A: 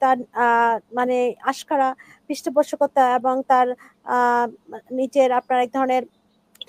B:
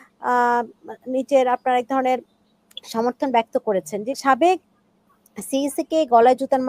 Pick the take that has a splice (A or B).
B